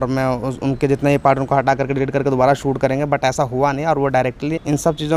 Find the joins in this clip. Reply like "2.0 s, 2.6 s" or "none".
none